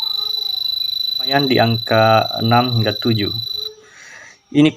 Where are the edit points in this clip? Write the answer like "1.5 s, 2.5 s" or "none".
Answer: 1.3 s

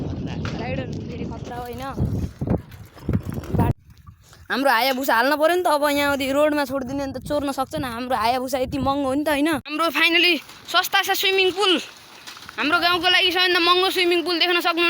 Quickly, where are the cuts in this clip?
3.7 s, 9.7 s

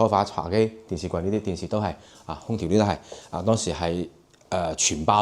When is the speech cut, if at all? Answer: none

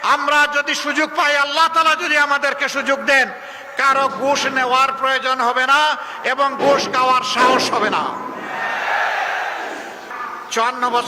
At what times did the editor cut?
9.9 s

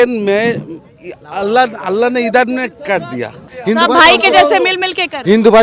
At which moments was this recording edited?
3.6 s

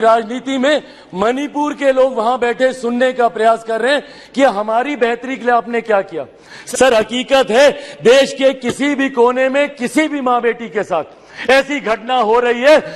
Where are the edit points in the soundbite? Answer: 6.5 s

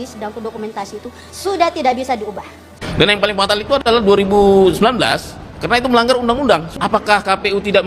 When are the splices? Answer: 2.8 s, 6.7 s

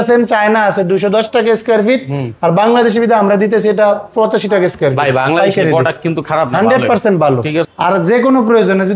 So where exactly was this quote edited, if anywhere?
7.7 s

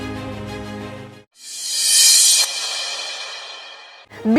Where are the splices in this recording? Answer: 1.1 s

